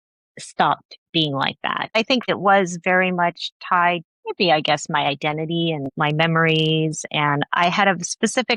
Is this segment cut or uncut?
cut